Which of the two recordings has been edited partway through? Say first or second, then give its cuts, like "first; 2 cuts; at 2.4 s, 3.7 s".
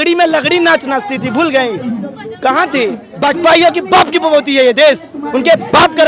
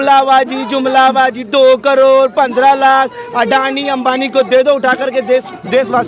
first; 1 cut; at 3.1 s